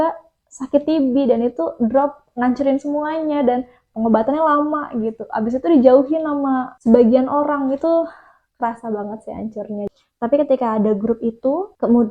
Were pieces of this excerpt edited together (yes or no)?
yes